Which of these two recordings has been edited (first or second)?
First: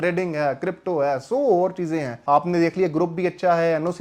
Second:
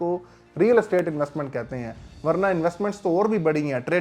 first